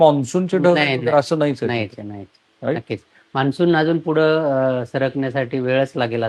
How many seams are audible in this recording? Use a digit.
0